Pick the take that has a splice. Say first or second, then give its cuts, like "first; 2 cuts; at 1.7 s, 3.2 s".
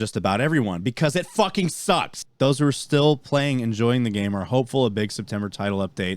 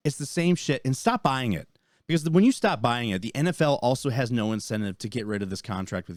first; 1 cut; at 2.2 s